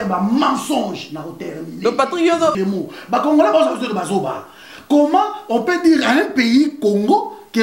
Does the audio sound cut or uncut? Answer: cut